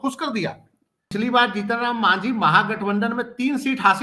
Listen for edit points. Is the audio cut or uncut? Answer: cut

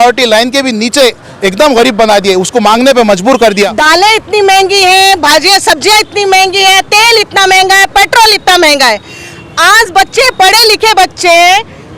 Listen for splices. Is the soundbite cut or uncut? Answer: cut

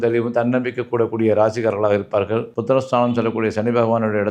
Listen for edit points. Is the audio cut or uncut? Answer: cut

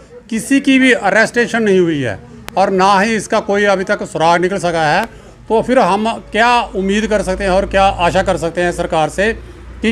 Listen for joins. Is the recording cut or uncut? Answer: uncut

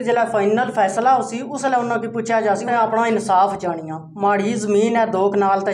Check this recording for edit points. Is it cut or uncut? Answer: cut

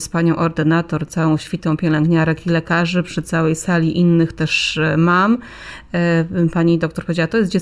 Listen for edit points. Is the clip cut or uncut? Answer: uncut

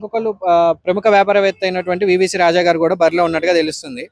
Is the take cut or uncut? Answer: uncut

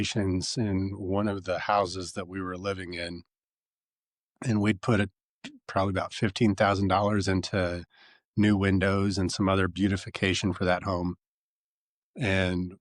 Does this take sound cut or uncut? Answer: uncut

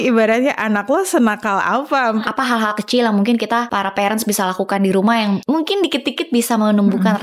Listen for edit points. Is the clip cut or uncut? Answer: cut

